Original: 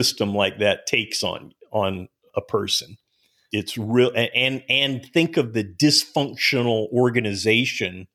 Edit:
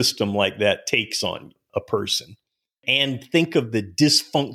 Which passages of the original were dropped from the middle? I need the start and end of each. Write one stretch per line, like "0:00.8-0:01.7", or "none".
0:01.5-0:02.1
0:03.4-0:04.6